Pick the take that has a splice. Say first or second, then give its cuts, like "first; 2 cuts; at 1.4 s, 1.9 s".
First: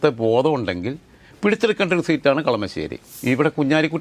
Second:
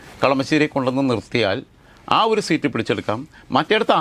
first; 1 cut; at 3.1 s